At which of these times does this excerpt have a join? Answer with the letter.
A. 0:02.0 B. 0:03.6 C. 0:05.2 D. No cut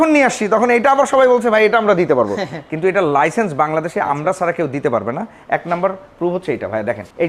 D